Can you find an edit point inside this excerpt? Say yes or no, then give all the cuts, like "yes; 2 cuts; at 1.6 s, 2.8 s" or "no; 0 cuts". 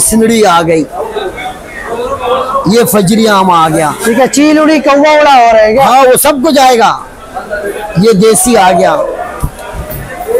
no; 0 cuts